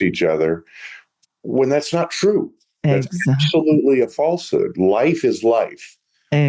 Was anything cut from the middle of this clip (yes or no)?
no